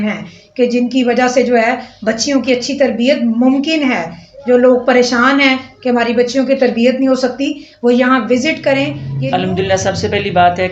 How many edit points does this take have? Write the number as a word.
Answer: one